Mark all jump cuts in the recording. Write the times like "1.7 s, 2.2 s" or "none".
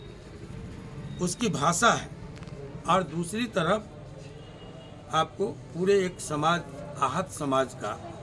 none